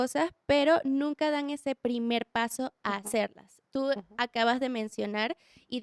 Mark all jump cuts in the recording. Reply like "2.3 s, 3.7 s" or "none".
none